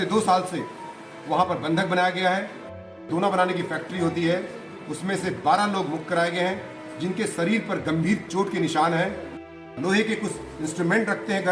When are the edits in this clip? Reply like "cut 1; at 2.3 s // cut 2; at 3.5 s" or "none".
cut 1; at 2.9 s // cut 2; at 9.7 s